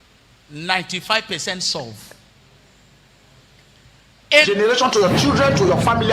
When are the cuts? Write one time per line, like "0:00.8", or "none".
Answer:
0:04.5